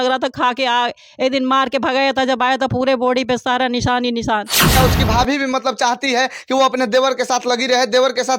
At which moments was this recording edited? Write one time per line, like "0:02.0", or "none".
0:04.7